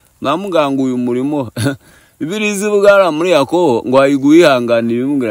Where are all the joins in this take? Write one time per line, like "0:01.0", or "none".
none